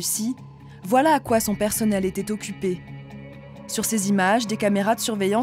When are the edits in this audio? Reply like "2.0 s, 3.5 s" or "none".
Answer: none